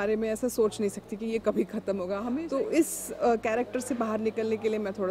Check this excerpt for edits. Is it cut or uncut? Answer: cut